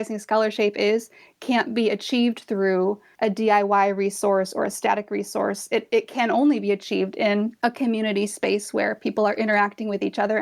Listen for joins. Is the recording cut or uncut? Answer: cut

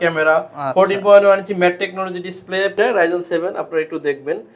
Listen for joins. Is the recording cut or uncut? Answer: cut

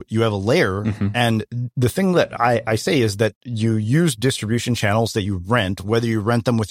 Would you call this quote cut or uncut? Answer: uncut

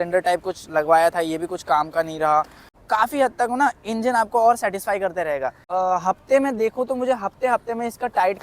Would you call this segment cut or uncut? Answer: cut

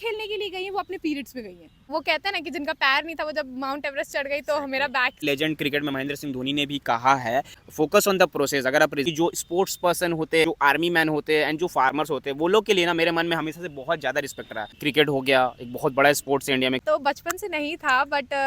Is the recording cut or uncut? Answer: cut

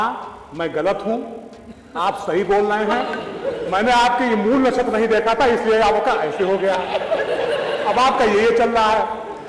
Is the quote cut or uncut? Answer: uncut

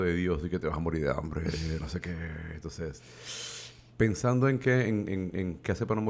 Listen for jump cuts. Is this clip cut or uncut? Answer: uncut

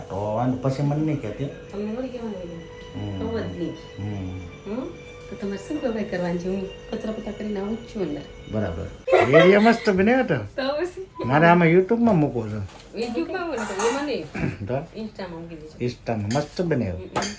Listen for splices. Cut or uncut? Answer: cut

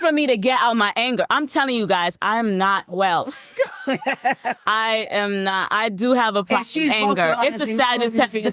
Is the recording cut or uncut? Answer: uncut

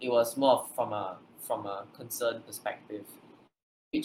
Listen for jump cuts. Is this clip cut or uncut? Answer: uncut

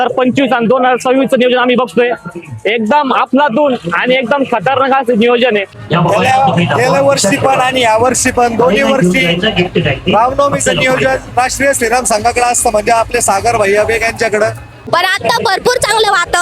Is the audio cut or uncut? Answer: cut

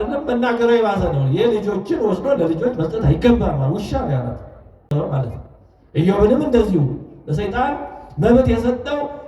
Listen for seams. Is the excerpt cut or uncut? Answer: cut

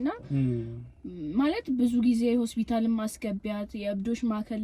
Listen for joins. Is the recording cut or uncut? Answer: uncut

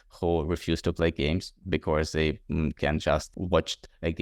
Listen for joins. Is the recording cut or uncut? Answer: cut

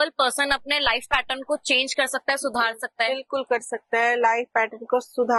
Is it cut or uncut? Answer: uncut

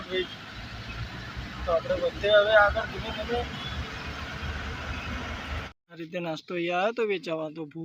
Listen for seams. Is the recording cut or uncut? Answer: cut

